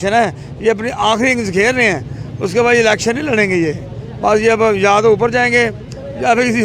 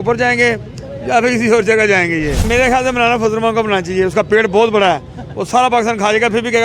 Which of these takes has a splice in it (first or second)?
second